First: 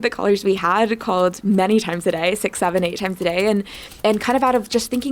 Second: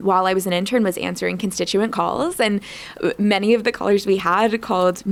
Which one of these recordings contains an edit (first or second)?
first